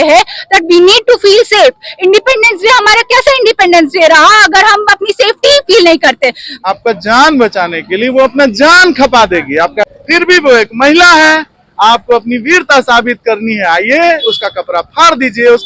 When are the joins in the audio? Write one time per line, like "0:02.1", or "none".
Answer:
0:06.5
0:09.8